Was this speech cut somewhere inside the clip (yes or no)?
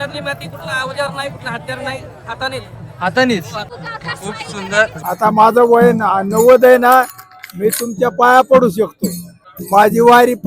yes